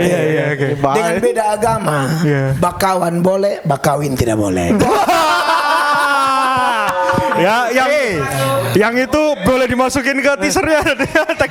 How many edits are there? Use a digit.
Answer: 0